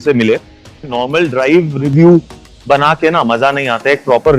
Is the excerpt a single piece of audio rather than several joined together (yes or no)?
no